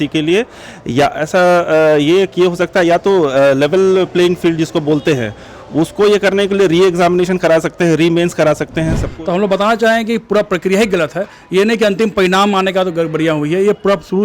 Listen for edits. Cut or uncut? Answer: cut